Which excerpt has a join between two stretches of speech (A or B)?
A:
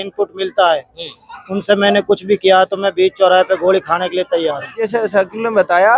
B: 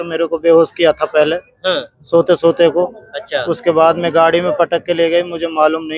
A